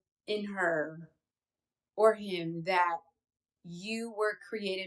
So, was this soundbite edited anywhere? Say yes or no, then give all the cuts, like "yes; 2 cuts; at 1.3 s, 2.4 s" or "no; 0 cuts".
no; 0 cuts